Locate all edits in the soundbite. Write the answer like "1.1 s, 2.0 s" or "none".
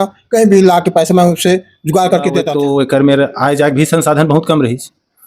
2.5 s

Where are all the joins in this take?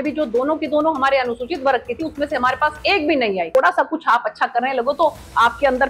3.5 s

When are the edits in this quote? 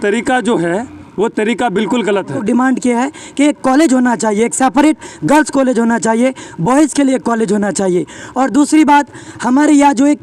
2.4 s

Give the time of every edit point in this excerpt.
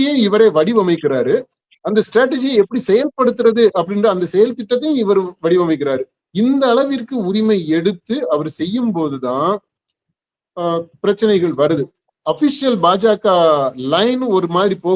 12.1 s

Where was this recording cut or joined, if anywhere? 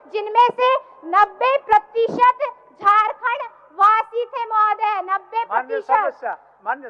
none

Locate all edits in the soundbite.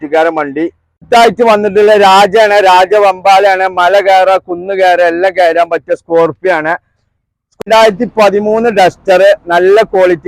1.0 s, 7.6 s

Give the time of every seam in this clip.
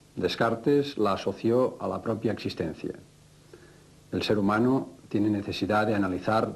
2.8 s

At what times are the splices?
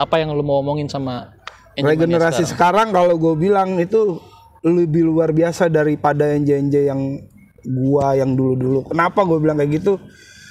none

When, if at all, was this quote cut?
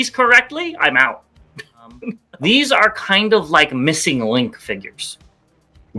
2.3 s

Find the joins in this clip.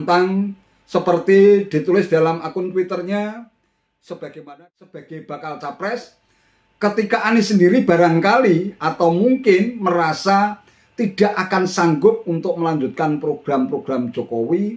5.0 s

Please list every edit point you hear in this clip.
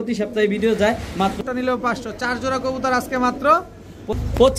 1.4 s

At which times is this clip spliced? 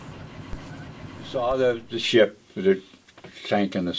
1.3 s

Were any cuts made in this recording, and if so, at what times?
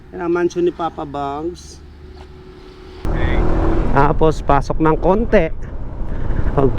3.1 s

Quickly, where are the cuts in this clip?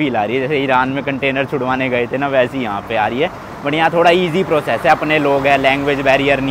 none

